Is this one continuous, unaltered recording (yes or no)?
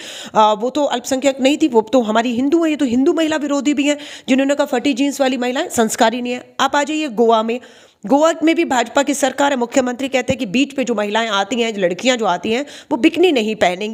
yes